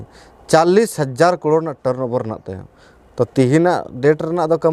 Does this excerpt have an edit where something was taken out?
no; 0 cuts

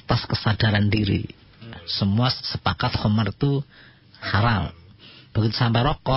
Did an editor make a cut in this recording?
yes; 1 cut; at 1.8 s

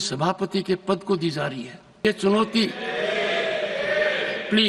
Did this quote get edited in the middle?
yes; 1 cut; at 2.0 s

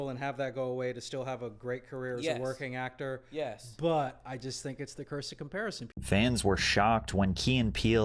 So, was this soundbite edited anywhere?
yes; 1 cut; at 6.0 s

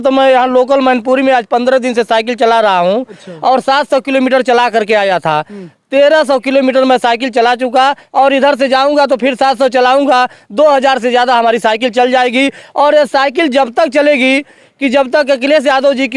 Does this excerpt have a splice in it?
no; 0 cuts

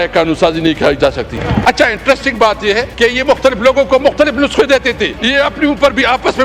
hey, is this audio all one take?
no; 3 cuts; at 1.5 s, 2.9 s, 5.2 s

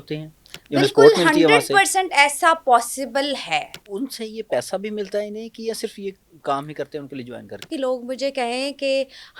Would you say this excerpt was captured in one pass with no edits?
no; 2 cuts; at 3.8 s, 7.6 s

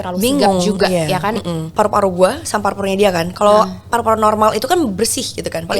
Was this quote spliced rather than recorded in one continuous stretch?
yes; 1 cut; at 1.7 s

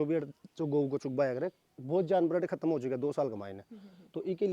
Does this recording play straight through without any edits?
yes; 0 cuts

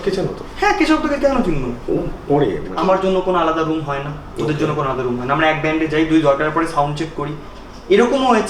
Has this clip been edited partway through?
yes; 1 cut; at 2.7 s

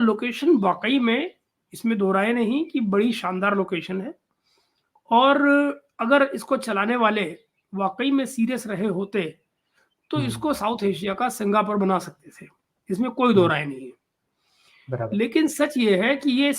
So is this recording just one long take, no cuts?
yes; 0 cuts

